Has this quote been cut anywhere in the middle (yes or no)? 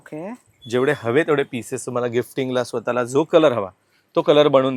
no